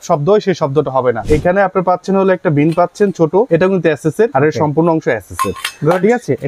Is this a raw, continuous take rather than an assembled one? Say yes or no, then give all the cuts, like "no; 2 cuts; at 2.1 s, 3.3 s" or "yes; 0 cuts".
no; 3 cuts; at 1.2 s, 3.5 s, 4.3 s